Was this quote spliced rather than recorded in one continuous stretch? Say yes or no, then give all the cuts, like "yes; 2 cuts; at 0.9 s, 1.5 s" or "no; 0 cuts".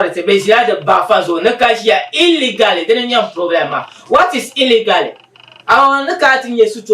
no; 0 cuts